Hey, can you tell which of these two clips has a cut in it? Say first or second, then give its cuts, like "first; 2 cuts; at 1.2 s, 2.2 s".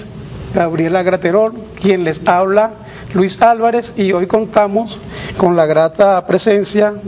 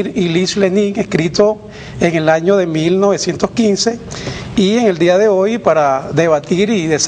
first; 1 cut; at 0.9 s